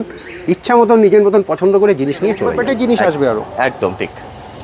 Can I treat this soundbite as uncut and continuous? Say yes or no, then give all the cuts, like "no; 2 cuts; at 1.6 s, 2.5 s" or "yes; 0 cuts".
no; 1 cut; at 2.6 s